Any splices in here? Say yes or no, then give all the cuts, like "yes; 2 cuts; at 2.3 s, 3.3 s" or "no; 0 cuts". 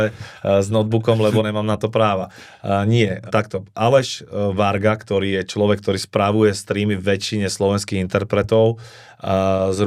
no; 0 cuts